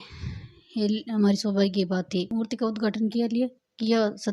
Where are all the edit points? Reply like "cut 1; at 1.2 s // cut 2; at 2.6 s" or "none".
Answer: cut 1; at 2.3 s